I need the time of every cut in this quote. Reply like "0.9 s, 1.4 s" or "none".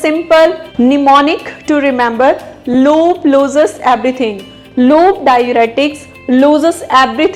none